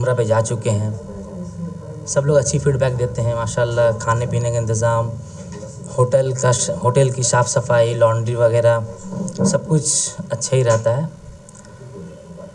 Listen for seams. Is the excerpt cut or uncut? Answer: uncut